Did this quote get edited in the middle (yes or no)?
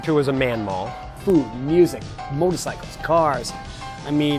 yes